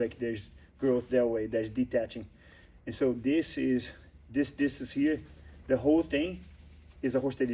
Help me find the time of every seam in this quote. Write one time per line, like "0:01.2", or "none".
none